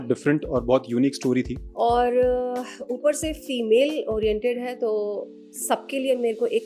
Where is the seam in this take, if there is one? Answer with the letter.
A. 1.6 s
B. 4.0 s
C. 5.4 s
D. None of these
A